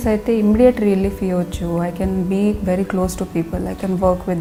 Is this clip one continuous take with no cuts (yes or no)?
yes